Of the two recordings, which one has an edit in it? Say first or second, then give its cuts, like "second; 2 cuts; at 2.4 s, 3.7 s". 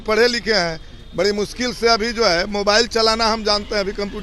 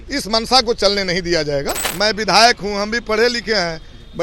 second; 1 cut; at 1.8 s